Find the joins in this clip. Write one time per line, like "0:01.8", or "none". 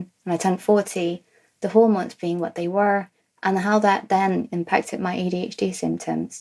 none